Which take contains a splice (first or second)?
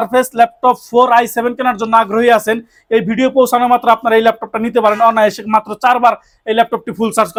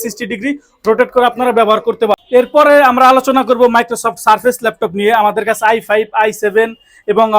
second